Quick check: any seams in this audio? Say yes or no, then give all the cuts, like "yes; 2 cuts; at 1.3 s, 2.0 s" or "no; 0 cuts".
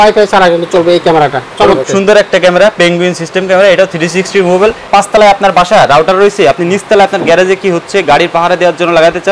yes; 2 cuts; at 1.8 s, 4.9 s